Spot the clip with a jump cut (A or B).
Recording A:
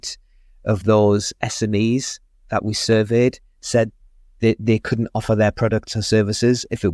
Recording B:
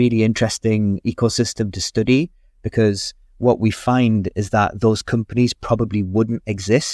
B